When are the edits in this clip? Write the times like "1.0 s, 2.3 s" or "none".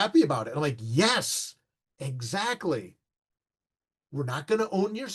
none